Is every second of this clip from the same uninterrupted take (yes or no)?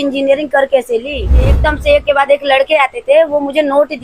no